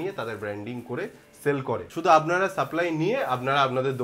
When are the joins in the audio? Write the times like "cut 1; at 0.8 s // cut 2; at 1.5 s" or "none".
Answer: cut 1; at 1.9 s

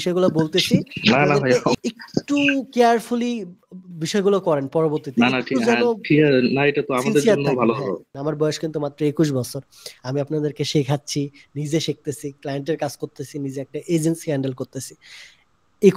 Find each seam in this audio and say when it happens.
cut 1; at 1.8 s // cut 2; at 8.1 s

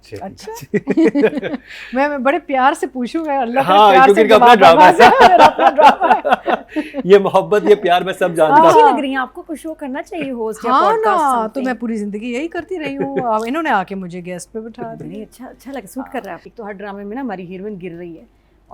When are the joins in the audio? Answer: cut 1; at 16.5 s

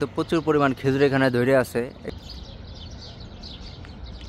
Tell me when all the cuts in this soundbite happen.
cut 1; at 2.0 s

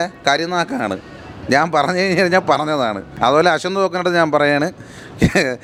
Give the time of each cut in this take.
none

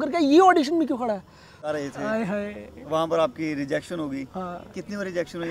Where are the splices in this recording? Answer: cut 1; at 1.7 s

